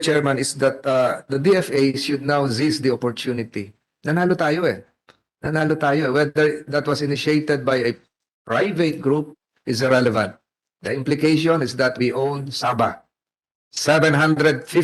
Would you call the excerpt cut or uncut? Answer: uncut